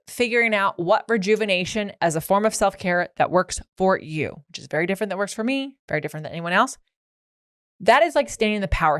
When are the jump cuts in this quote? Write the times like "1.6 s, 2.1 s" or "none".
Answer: 1.9 s